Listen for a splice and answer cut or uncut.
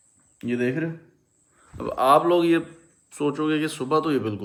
uncut